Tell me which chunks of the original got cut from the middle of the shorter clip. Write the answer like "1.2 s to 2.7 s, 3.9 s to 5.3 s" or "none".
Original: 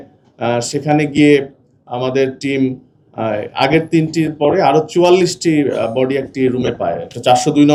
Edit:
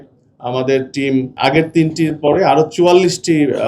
2.8 s to 3.5 s